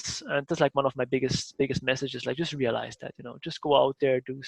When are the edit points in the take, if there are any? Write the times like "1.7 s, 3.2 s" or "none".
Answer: none